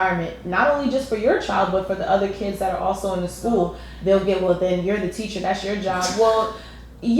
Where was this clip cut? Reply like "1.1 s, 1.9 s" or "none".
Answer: 3.8 s